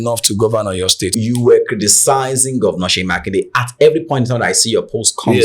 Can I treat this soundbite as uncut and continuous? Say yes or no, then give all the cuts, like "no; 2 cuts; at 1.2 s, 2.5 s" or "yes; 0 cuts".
no; 1 cut; at 1.1 s